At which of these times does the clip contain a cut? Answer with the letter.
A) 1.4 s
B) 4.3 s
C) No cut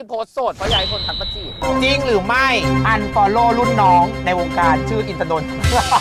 A